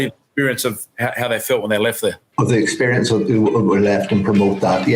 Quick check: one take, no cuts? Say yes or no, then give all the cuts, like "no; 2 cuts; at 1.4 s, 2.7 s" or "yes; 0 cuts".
yes; 0 cuts